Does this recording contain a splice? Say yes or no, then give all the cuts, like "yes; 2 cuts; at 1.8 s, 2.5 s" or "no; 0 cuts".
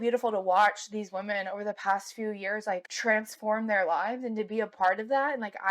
yes; 1 cut; at 2.9 s